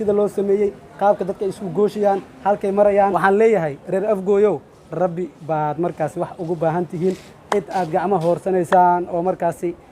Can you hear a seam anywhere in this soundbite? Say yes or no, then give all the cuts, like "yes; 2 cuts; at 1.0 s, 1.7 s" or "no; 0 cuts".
yes; 1 cut; at 3.1 s